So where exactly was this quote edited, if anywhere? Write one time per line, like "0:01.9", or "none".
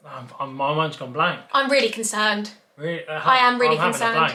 none